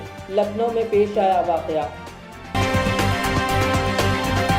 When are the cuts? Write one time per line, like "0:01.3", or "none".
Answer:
none